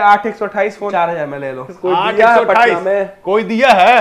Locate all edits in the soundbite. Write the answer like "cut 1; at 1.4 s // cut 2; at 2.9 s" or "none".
cut 1; at 0.9 s // cut 2; at 1.7 s